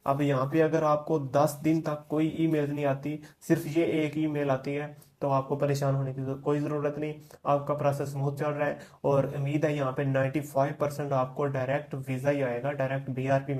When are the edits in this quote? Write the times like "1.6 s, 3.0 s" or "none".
none